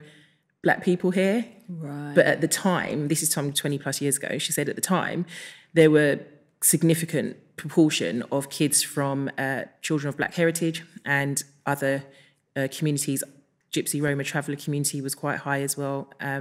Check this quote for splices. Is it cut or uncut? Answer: uncut